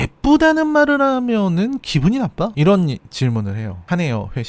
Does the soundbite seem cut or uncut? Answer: uncut